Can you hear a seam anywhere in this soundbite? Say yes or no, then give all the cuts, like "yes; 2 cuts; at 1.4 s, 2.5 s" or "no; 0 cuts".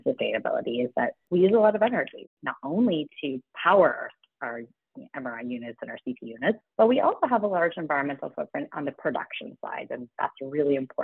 yes; 2 cuts; at 2.3 s, 6.6 s